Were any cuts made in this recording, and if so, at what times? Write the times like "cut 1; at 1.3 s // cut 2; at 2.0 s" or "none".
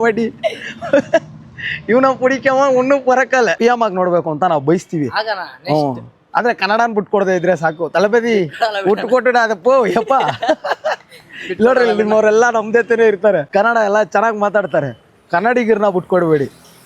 cut 1; at 3.6 s // cut 2; at 13.5 s